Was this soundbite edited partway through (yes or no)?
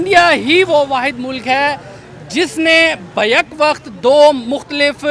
no